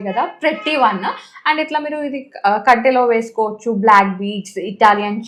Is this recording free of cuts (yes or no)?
yes